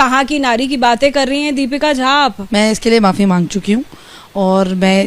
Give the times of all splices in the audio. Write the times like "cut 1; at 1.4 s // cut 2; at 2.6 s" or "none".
cut 1; at 2.4 s